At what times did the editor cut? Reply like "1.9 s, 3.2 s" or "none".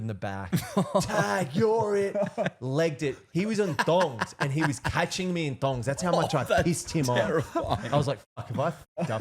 none